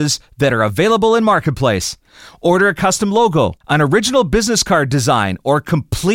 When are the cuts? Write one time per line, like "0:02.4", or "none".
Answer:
0:03.6